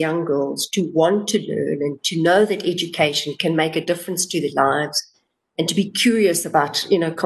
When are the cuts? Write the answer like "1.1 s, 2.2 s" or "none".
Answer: none